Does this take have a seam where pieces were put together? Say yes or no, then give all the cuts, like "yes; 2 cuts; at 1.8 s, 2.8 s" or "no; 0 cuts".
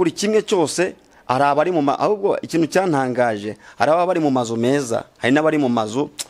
no; 0 cuts